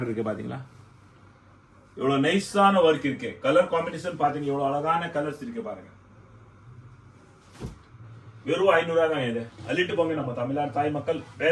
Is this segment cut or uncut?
uncut